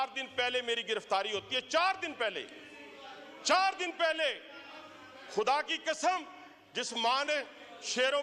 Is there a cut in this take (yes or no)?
no